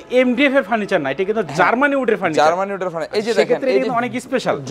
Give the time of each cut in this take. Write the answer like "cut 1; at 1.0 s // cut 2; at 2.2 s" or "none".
none